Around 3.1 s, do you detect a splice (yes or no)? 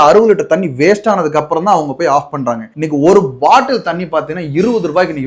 no